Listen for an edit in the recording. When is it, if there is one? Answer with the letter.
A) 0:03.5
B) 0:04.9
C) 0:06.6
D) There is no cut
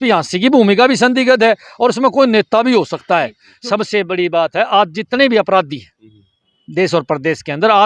A